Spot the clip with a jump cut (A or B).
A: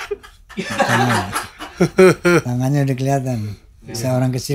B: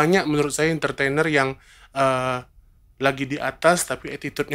A